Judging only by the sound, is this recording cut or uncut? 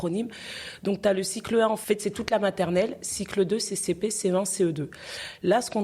cut